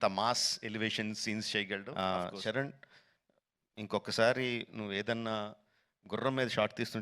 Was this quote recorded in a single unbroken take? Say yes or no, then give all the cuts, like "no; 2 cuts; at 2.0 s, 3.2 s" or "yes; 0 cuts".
no; 1 cut; at 1.9 s